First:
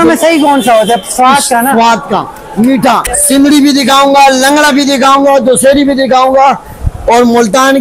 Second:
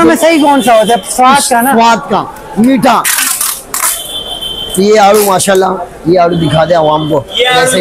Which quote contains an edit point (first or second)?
first